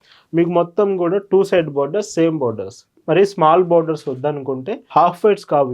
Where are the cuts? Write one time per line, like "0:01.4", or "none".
0:04.7